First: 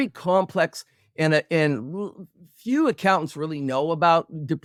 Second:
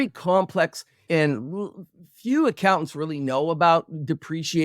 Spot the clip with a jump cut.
second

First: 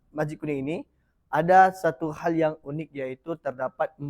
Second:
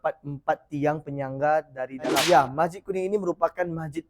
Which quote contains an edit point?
second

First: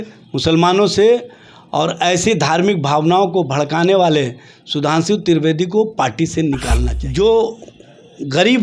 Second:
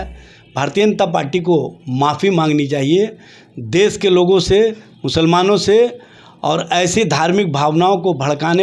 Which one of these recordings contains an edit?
first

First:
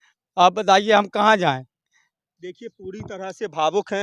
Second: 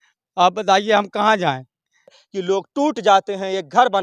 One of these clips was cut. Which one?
second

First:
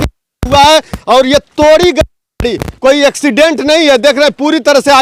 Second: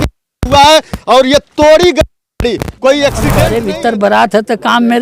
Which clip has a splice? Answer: second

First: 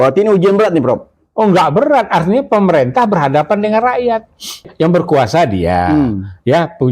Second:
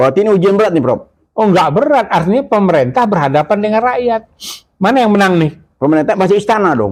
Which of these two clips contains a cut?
first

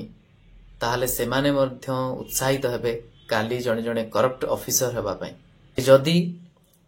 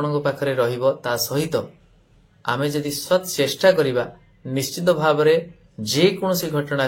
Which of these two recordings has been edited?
first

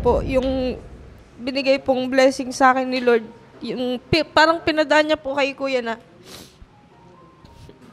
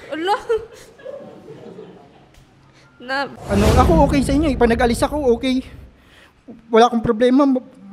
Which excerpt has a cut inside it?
second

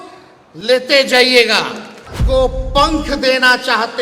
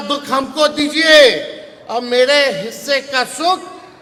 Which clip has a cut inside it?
first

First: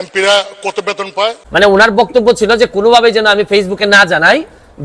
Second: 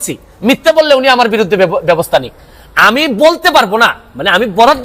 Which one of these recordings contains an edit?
first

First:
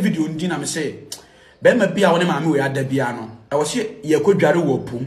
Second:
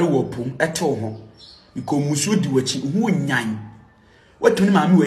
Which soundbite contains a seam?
first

